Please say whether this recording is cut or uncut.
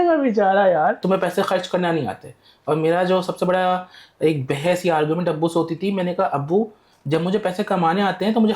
cut